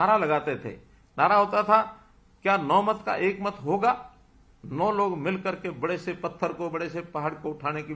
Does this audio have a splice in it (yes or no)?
no